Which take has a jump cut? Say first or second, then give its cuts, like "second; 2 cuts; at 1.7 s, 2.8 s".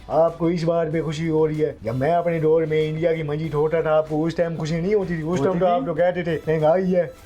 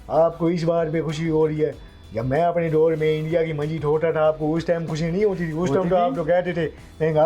first; 2 cuts; at 1.8 s, 6.4 s